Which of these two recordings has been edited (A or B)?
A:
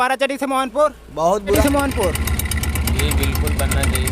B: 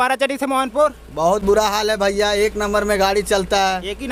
A